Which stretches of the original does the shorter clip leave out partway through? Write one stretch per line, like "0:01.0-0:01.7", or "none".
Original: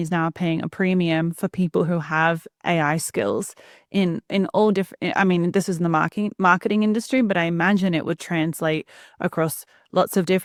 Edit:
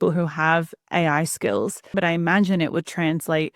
0:03.7-0:07.3